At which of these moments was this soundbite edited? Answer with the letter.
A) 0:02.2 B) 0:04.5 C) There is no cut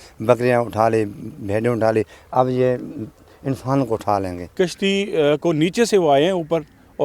B